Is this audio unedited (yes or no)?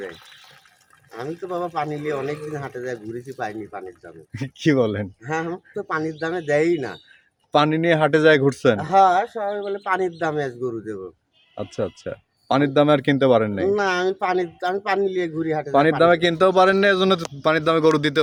yes